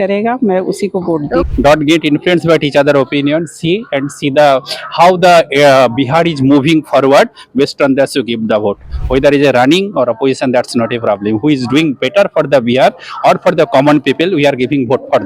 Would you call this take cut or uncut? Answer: cut